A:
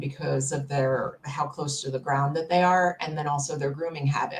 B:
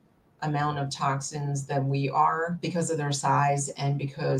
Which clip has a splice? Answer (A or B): B